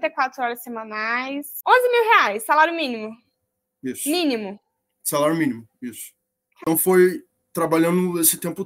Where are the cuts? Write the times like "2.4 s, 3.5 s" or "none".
1.5 s, 6.6 s